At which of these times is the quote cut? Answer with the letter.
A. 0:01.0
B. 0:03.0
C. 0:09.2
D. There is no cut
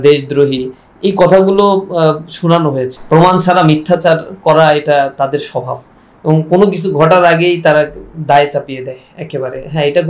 B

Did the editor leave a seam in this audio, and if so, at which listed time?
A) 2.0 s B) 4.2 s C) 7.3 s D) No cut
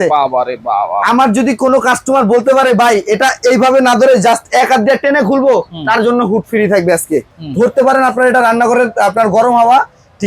C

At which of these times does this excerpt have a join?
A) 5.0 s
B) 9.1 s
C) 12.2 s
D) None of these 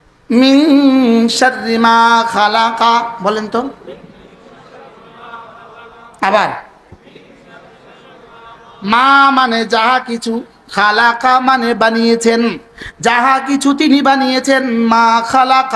D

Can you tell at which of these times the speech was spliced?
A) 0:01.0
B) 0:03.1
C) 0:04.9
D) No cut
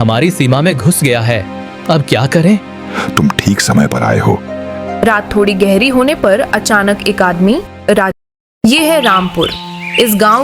B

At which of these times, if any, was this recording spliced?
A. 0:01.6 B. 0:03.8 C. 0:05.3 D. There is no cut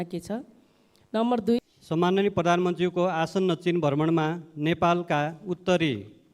A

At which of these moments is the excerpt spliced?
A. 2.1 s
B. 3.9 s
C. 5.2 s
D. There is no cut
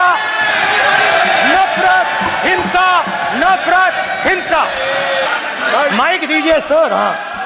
C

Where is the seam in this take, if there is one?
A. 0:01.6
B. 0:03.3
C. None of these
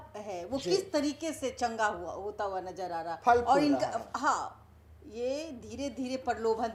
C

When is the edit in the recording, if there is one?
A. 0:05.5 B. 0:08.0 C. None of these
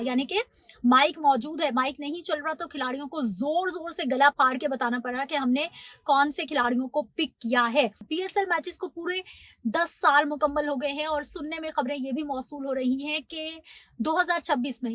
B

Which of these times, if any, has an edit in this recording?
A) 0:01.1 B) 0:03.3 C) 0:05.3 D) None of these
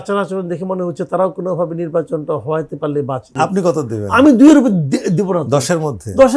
B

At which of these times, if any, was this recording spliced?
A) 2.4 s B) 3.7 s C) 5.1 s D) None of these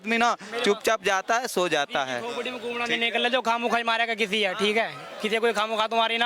D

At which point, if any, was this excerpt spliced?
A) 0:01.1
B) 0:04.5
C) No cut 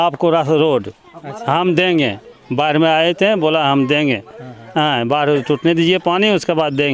C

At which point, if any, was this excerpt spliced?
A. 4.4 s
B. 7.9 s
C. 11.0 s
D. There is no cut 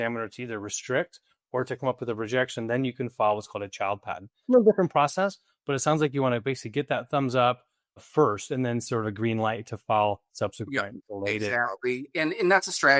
A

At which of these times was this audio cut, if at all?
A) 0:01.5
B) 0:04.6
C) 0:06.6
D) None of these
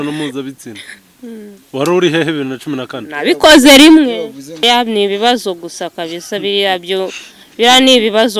B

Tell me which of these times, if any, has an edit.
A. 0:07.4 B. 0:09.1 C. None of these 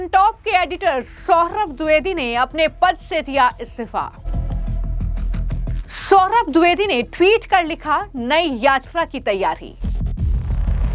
C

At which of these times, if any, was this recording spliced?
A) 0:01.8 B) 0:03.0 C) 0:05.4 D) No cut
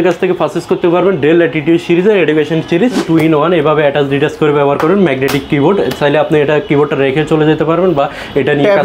B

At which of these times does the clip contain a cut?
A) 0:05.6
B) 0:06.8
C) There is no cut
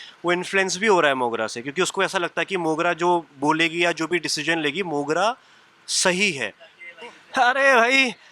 B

